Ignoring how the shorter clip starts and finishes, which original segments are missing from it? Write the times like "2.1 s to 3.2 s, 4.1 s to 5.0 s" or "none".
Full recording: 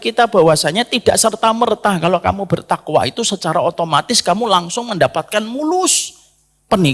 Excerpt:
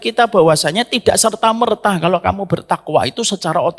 none